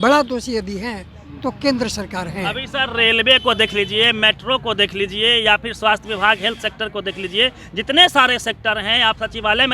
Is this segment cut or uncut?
uncut